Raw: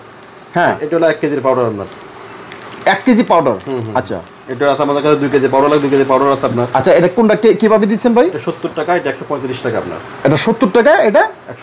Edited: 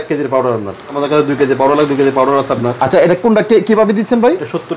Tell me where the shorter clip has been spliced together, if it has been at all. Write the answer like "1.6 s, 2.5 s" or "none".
0.9 s